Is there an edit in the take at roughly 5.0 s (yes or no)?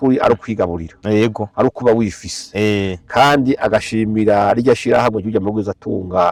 no